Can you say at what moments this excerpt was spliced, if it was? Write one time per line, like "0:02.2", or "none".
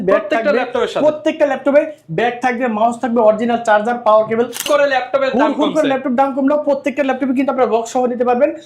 0:04.6